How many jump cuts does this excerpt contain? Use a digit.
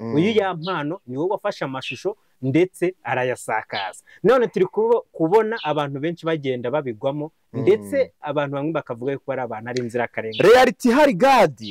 0